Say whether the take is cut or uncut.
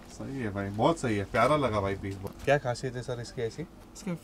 cut